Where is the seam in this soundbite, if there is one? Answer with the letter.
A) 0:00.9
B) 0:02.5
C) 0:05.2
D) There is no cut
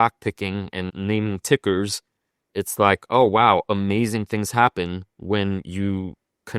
A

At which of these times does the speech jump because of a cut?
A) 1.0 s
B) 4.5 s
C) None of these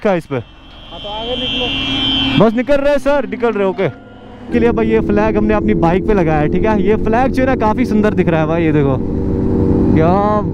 B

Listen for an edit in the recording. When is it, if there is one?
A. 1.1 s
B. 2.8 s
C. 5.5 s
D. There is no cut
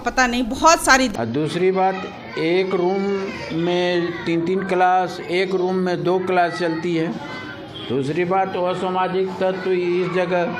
A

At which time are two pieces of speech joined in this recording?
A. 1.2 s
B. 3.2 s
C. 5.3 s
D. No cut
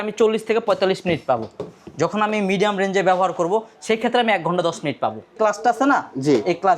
C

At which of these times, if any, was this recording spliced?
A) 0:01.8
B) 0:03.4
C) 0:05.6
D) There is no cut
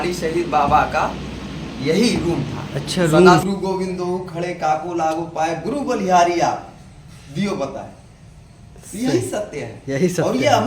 B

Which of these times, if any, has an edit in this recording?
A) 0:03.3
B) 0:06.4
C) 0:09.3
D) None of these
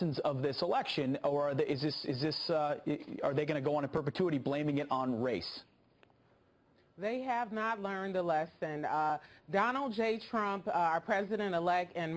C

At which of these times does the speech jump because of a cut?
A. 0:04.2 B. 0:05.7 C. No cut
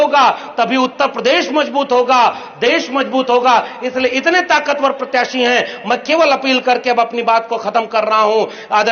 C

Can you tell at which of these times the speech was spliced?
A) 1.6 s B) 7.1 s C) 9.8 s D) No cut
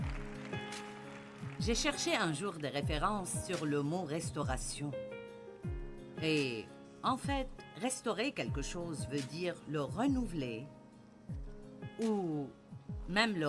A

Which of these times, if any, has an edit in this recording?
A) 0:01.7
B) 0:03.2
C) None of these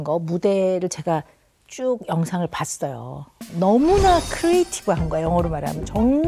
C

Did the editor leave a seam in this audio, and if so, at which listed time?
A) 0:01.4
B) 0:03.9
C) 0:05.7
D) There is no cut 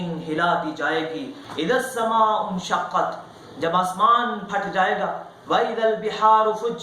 A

